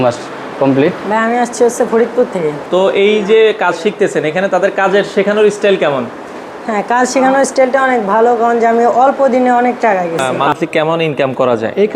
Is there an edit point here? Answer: yes; 3 cuts; at 1.0 s, 2.6 s, 10.3 s

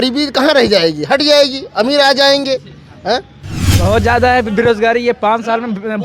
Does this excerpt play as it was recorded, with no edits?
no; 1 cut; at 3.6 s

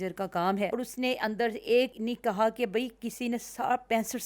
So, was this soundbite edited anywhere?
yes; 2 cuts; at 0.7 s, 2.0 s

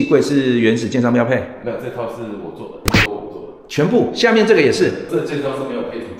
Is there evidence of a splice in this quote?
yes; 2 cuts; at 2.9 s, 5.1 s

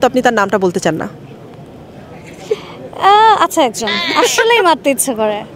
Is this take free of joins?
yes; 0 cuts

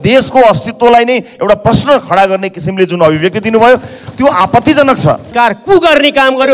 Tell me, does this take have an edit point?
yes; 1 cut; at 5.3 s

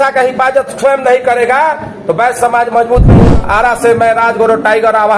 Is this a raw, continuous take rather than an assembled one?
no; 1 cut; at 3.1 s

